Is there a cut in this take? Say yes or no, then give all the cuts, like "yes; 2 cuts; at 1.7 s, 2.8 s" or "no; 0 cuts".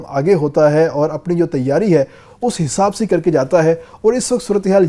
no; 0 cuts